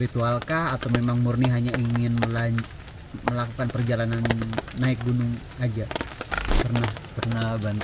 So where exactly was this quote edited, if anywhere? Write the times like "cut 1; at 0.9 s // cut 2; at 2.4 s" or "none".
cut 1; at 6.4 s